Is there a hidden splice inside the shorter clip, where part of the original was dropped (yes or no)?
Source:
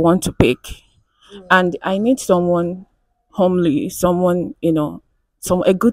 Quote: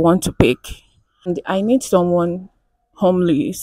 yes